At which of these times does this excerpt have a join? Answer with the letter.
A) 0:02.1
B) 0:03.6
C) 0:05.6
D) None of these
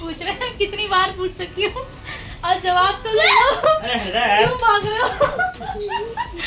D